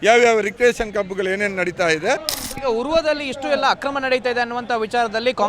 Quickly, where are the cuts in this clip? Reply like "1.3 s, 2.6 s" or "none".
2.3 s